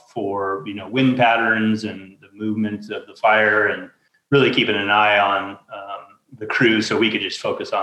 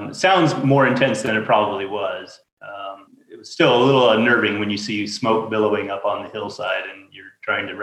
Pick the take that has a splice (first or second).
second